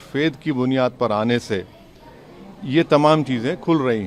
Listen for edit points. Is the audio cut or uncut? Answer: uncut